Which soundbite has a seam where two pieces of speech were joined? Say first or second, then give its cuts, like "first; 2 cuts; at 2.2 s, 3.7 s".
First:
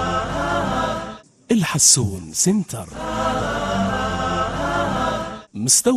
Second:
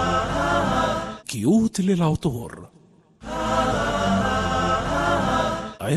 first; 1 cut; at 1.1 s